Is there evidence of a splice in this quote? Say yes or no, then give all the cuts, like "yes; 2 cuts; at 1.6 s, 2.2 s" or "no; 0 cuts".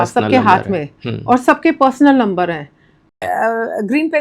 yes; 1 cut; at 3.2 s